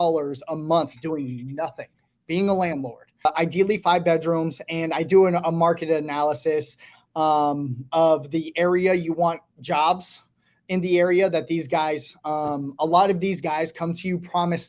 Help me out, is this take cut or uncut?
cut